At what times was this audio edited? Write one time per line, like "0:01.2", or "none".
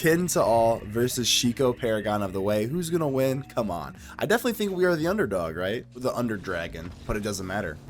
0:06.0